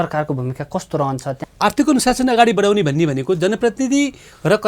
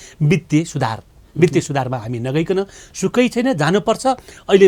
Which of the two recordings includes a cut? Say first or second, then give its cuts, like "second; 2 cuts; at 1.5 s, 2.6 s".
first; 1 cut; at 1.4 s